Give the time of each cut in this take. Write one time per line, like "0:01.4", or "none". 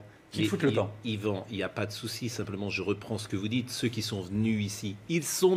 none